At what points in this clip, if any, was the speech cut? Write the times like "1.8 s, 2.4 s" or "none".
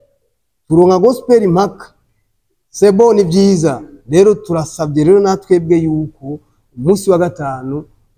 none